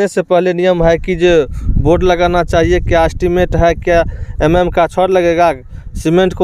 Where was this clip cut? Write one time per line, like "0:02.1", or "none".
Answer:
none